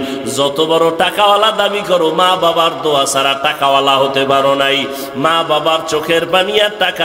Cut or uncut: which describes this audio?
uncut